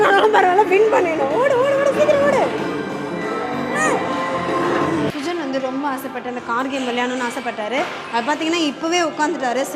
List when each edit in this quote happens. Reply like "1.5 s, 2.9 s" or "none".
5.1 s

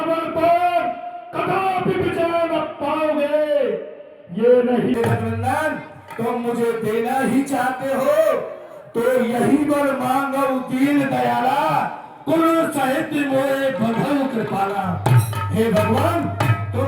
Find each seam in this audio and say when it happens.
5.0 s

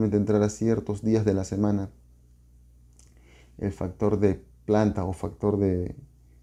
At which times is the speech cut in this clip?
none

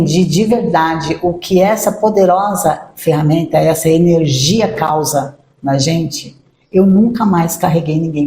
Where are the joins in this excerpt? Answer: none

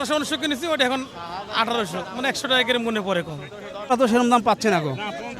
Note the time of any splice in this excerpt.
3.9 s

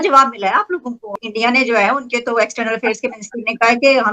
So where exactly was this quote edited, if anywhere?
1.1 s

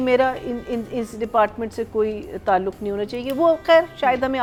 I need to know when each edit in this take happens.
none

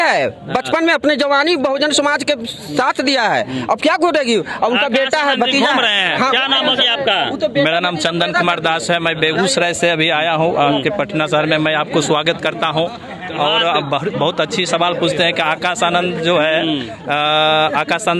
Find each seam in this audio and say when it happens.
none

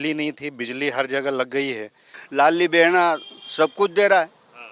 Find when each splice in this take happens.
2.1 s

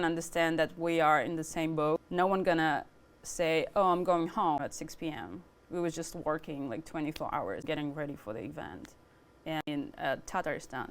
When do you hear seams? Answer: 2.0 s, 4.6 s, 7.6 s, 9.6 s

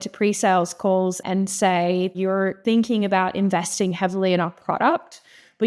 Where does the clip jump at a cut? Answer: 1.2 s, 2.2 s

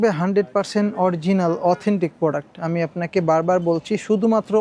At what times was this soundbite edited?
none

